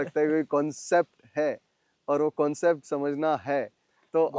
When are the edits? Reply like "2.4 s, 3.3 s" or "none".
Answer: none